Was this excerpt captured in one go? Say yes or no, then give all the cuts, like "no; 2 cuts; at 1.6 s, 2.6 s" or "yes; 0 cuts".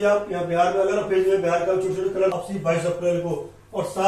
no; 1 cut; at 2.2 s